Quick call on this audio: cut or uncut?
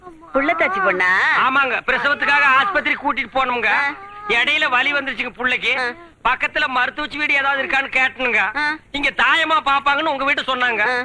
cut